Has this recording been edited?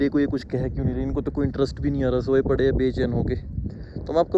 no; 0 cuts

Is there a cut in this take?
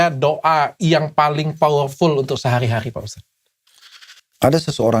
no; 0 cuts

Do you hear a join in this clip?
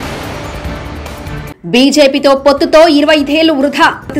yes; 1 cut; at 1.5 s

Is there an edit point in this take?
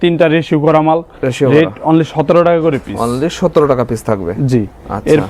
no; 0 cuts

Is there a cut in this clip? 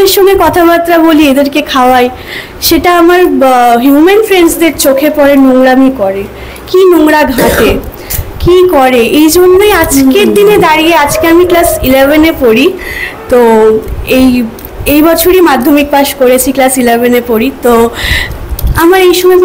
no; 0 cuts

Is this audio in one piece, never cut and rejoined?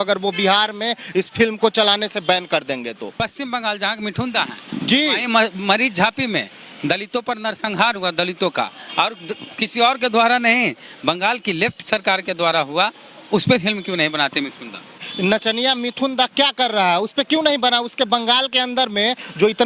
no; 2 cuts; at 3.2 s, 15.0 s

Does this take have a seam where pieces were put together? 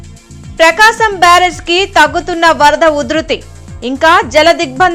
no; 0 cuts

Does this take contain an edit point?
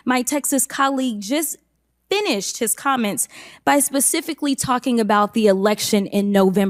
no; 0 cuts

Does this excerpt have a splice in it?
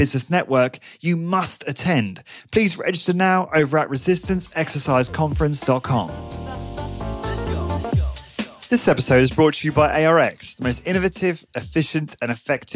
yes; 2 cuts; at 6.2 s, 8.0 s

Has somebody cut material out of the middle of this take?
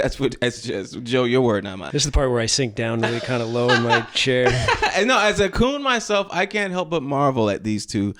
no; 0 cuts

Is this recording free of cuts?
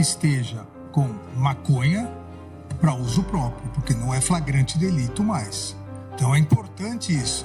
yes; 0 cuts

